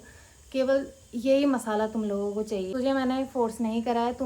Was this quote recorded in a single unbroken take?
no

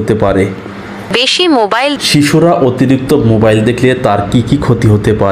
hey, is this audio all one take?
no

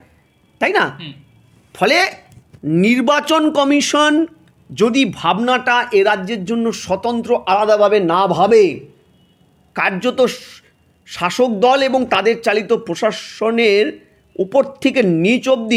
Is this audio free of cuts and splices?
yes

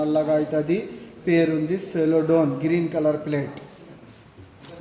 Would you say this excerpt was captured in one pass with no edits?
yes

